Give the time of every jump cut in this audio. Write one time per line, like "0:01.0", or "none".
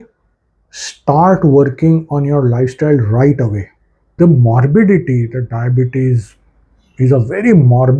0:04.1